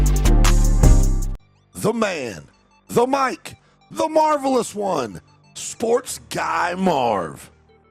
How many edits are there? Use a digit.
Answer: 1